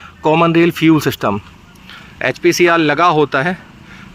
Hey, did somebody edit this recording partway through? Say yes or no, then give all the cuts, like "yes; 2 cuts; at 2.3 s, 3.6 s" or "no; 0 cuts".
no; 0 cuts